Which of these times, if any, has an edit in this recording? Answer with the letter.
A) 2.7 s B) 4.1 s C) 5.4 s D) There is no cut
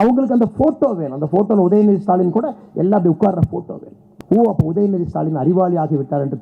B